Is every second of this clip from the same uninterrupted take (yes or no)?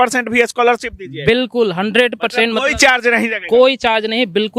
yes